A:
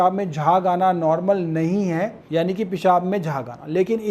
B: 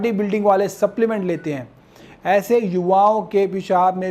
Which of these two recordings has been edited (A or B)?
A